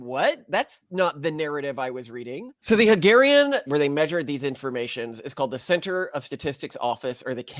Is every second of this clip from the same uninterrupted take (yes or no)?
no